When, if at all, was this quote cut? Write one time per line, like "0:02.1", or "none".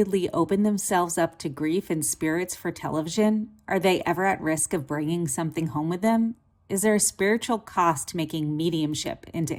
none